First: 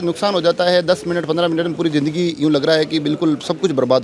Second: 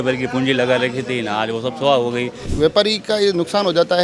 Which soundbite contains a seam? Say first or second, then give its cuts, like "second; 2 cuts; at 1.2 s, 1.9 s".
second; 1 cut; at 2.4 s